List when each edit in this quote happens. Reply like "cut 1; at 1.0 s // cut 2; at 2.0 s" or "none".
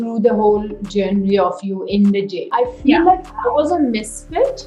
cut 1; at 2.5 s